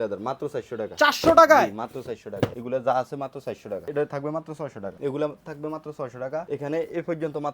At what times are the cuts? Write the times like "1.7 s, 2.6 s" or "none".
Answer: 2.6 s, 3.7 s, 4.9 s, 6.5 s

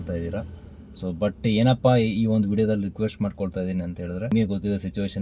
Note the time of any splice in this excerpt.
4.3 s

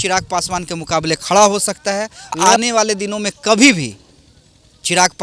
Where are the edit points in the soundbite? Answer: 2.3 s

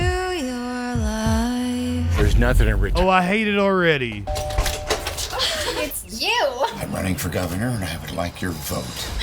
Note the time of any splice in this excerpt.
4.3 s

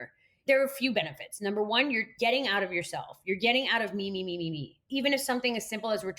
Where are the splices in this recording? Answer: 4.7 s

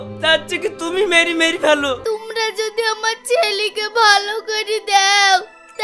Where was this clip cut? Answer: 2.0 s

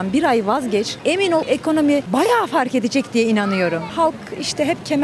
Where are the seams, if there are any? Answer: 1.4 s, 3.9 s

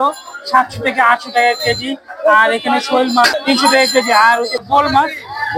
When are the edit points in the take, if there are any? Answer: 3.4 s, 4.6 s

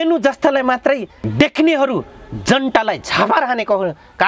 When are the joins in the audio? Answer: 1.2 s

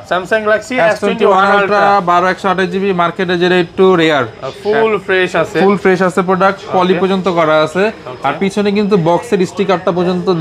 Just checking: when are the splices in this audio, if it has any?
none

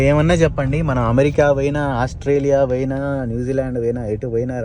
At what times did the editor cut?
none

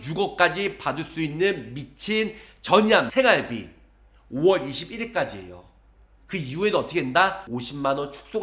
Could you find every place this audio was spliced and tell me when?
3.1 s

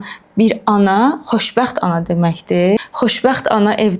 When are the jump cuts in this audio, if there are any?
2.8 s

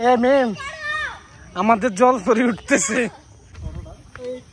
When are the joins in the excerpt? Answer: 3.5 s

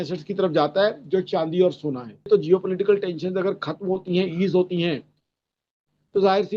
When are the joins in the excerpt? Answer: 2.3 s

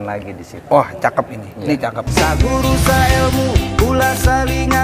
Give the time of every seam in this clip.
2.1 s

